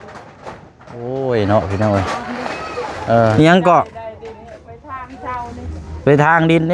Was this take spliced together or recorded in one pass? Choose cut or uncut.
cut